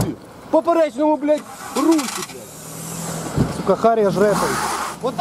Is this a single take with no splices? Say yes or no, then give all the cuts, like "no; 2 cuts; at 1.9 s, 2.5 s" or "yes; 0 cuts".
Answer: yes; 0 cuts